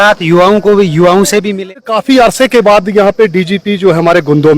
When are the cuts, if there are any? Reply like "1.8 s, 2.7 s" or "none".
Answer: 1.7 s